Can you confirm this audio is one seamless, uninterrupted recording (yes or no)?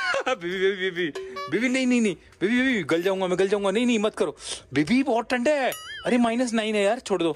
yes